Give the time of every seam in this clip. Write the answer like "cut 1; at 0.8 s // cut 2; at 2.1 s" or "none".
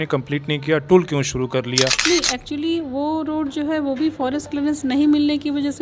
cut 1; at 2.0 s